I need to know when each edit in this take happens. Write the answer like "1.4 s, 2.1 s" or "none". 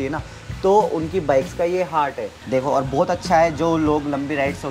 2.3 s